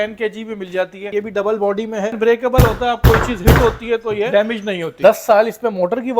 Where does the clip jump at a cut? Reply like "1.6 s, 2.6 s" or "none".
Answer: 1.1 s, 2.2 s, 4.3 s